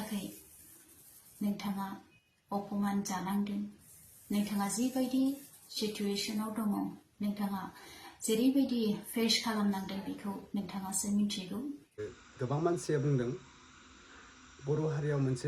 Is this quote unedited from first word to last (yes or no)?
no